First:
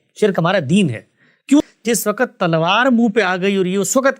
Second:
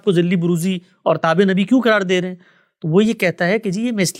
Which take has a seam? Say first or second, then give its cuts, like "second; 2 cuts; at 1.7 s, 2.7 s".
first; 1 cut; at 1.6 s